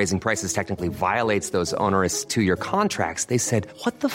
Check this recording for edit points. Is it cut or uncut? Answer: uncut